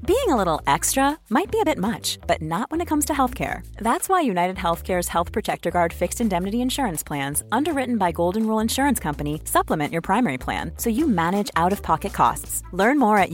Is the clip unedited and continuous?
yes; 0 cuts

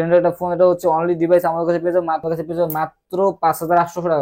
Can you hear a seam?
yes; 1 cut; at 2.2 s

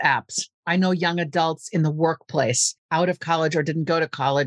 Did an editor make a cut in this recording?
yes; 1 cut; at 2.7 s

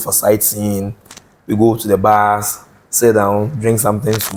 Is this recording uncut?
yes; 0 cuts

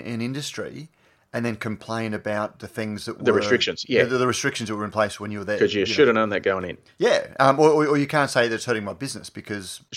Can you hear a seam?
no; 0 cuts

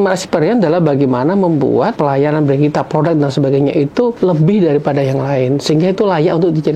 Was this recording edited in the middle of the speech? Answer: no; 0 cuts

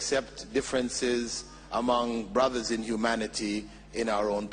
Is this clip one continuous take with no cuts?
yes; 0 cuts

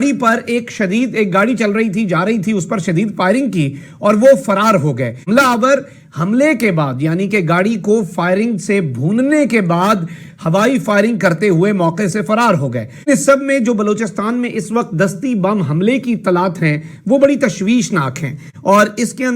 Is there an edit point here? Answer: yes; 1 cut; at 13.0 s

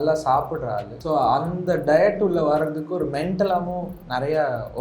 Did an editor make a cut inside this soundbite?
yes; 1 cut; at 0.9 s

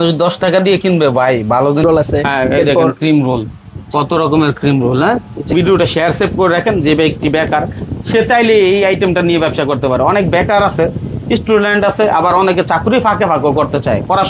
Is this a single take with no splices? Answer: no; 2 cuts; at 1.8 s, 5.5 s

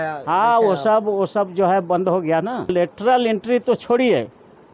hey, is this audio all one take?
no; 1 cut; at 2.7 s

